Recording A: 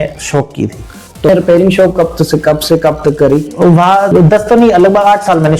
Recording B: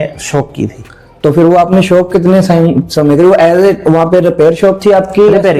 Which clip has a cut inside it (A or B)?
A